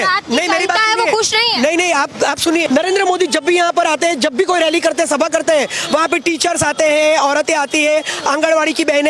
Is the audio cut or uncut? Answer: cut